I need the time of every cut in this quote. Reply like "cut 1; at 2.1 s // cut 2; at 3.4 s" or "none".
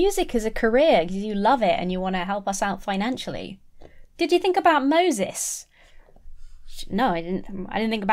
none